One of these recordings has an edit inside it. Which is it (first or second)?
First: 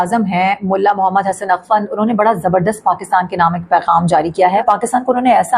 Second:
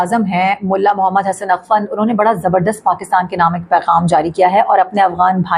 first